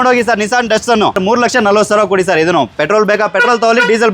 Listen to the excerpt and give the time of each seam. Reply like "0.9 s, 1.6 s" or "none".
1.2 s